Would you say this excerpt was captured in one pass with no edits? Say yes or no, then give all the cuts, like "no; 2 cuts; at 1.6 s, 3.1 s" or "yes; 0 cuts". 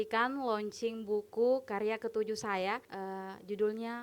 no; 1 cut; at 2.9 s